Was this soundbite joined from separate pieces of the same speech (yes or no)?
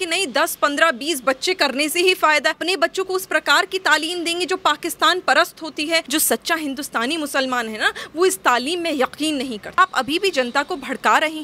yes